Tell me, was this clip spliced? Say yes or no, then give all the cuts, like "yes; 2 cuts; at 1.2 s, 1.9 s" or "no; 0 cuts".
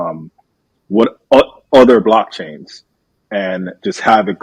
no; 0 cuts